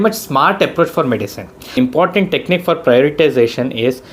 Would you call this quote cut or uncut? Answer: cut